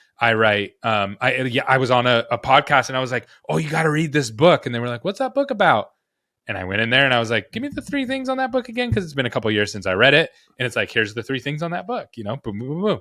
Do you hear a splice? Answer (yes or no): no